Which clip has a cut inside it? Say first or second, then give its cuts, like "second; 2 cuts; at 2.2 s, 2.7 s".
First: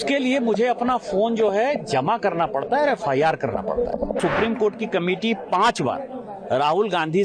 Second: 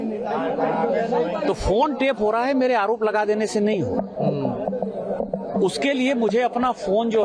first; 1 cut; at 4.2 s